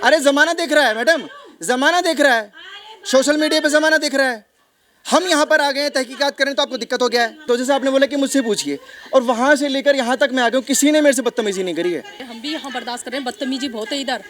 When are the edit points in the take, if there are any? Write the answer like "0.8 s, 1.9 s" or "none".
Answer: 7.5 s, 12.2 s